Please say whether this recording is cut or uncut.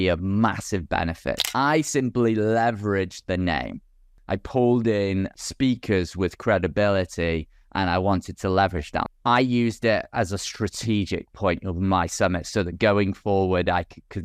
cut